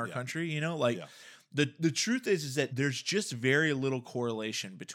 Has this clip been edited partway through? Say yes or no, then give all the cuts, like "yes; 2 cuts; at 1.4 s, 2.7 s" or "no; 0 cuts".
yes; 1 cut; at 2.7 s